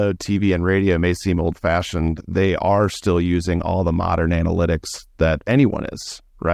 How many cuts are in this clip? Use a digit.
0